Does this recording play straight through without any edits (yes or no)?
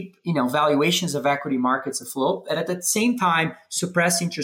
yes